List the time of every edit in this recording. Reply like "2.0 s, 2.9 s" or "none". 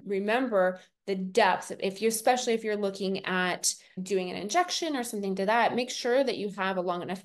none